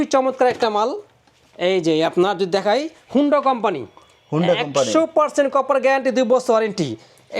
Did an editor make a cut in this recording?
no; 0 cuts

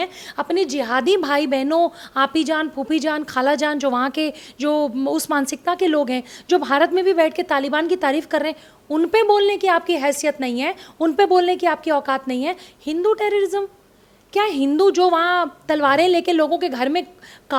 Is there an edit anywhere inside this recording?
no; 0 cuts

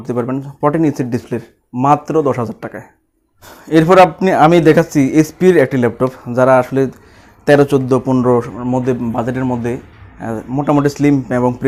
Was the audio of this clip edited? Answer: no; 0 cuts

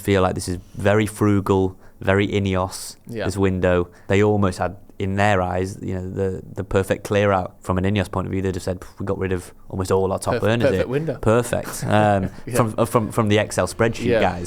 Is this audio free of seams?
no; 2 cuts; at 4.0 s, 7.6 s

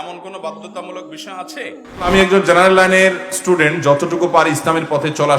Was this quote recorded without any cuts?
no; 1 cut; at 1.9 s

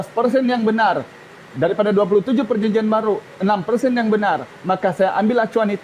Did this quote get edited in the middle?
no; 0 cuts

